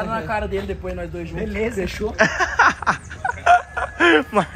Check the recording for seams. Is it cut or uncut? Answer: uncut